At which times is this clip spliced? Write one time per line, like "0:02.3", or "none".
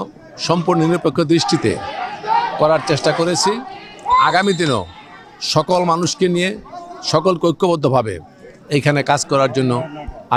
none